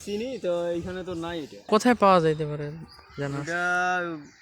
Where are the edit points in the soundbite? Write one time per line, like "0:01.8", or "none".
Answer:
0:01.6